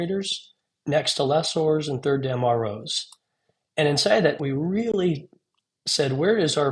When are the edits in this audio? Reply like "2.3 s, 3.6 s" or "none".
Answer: 4.4 s